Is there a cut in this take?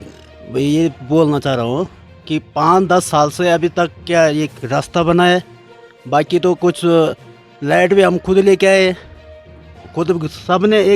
no; 0 cuts

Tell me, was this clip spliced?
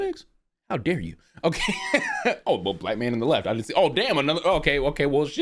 no; 0 cuts

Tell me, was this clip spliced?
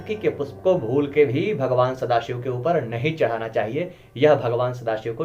no; 0 cuts

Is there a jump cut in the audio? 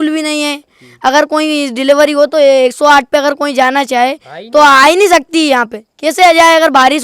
no; 0 cuts

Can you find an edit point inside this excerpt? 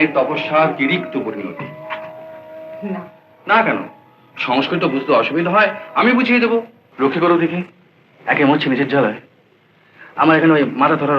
yes; 1 cut; at 6.8 s

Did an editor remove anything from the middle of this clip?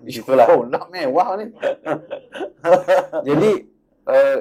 no; 0 cuts

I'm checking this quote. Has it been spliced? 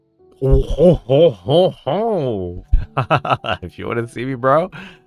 yes; 1 cut; at 2.6 s

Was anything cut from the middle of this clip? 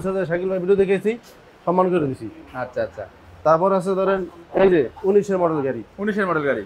no; 0 cuts

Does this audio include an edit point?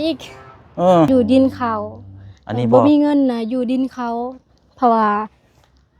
yes; 1 cut; at 1.1 s

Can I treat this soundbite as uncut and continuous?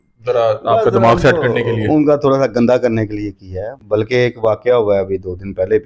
yes; 0 cuts

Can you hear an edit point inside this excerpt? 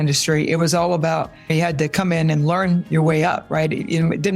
yes; 1 cut; at 1.5 s

